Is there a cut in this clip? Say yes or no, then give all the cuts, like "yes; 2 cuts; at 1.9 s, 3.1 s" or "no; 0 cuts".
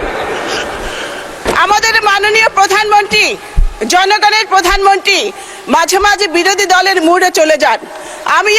yes; 1 cut; at 1.4 s